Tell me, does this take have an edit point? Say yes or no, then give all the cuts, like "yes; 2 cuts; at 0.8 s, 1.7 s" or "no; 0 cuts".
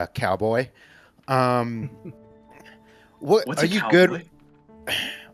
no; 0 cuts